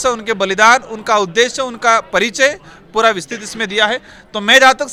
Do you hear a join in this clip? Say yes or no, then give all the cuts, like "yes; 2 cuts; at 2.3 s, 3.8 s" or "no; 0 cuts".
no; 0 cuts